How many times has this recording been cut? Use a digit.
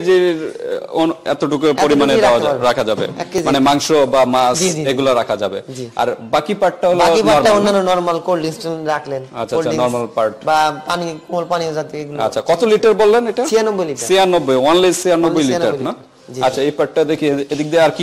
0